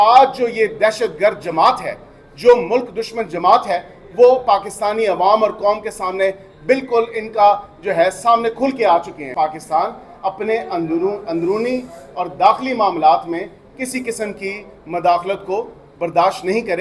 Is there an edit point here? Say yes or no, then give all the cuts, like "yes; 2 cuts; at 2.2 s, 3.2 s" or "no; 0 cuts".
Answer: yes; 1 cut; at 9.4 s